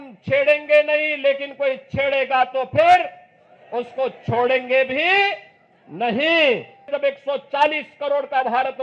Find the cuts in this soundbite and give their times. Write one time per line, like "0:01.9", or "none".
0:06.9